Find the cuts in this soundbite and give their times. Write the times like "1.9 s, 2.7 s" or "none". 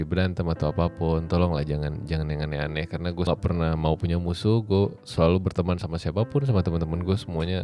3.3 s